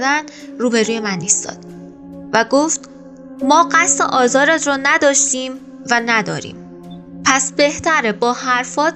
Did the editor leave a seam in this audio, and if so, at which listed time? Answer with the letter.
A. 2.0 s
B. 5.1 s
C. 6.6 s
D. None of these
D